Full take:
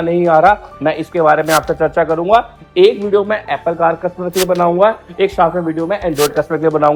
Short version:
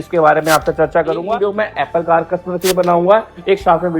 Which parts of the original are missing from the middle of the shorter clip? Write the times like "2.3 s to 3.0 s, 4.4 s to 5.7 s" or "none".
2.3 s to 3.0 s